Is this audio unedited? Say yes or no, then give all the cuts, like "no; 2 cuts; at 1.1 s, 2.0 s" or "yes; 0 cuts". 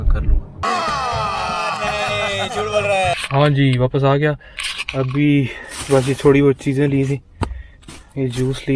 yes; 0 cuts